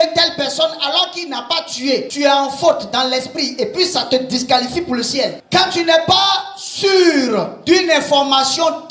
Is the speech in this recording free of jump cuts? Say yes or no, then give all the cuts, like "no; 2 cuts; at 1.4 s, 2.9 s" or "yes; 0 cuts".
no; 2 cuts; at 2.1 s, 5.4 s